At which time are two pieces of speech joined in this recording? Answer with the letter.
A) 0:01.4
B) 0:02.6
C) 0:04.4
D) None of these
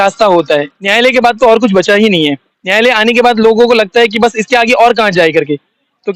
D